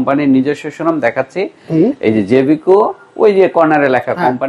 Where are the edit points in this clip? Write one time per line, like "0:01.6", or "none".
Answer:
none

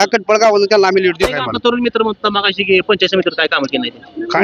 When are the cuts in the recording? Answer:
0:01.5

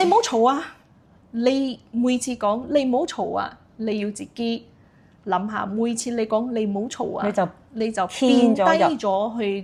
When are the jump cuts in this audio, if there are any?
none

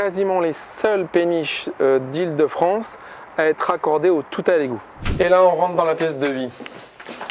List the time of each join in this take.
0:05.0

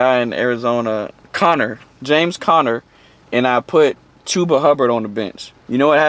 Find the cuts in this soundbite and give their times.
0:01.2

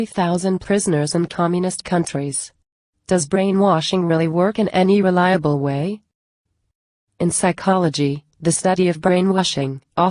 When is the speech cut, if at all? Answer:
0:02.0

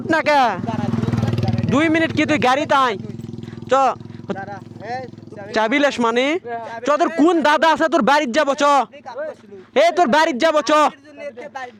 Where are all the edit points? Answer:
none

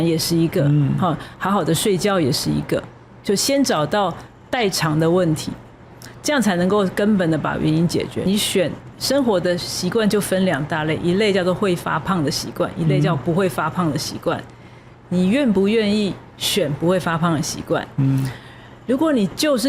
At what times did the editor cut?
0:08.2

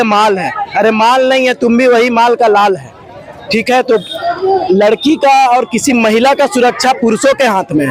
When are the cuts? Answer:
none

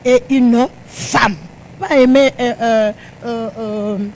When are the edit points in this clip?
0:01.8

